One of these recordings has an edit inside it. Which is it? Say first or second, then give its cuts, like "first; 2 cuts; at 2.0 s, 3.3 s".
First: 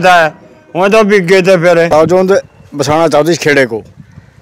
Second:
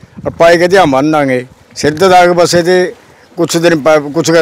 first; 1 cut; at 1.9 s